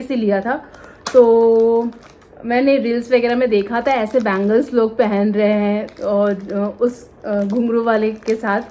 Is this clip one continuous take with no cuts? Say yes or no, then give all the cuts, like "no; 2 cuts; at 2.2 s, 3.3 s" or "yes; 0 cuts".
yes; 0 cuts